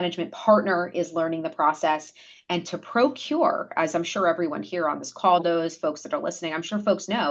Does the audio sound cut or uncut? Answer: uncut